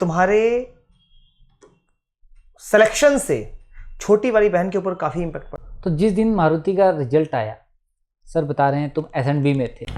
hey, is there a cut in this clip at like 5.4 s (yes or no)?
yes